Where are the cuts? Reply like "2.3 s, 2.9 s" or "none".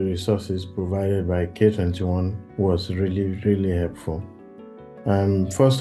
none